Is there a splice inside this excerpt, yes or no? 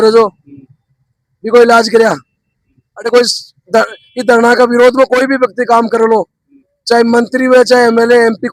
no